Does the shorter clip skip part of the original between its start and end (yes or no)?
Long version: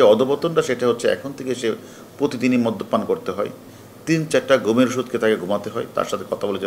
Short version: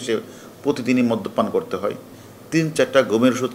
no